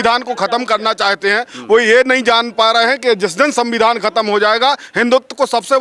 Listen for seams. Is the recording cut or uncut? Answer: uncut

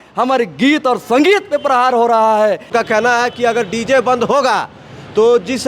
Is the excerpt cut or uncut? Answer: cut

